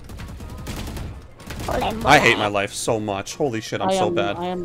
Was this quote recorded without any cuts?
yes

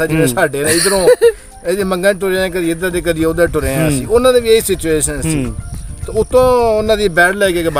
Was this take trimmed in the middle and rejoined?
no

